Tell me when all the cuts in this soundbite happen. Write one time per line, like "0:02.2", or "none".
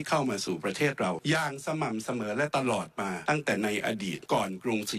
0:01.2
0:03.2
0:04.2